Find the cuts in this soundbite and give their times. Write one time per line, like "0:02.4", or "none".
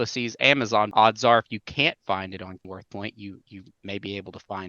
0:00.9
0:02.7